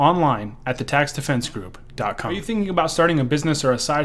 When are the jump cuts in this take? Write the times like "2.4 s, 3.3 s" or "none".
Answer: 2.4 s